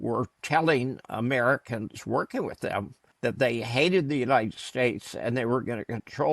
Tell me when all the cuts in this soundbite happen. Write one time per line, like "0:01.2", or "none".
0:03.0